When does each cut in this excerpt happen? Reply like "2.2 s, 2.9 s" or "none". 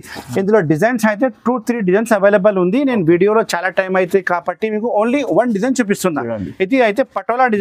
none